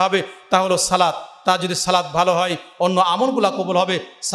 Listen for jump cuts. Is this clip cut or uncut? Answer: uncut